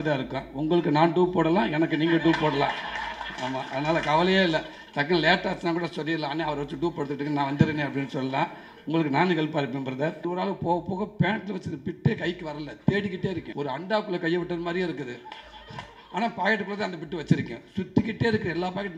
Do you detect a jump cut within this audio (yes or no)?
yes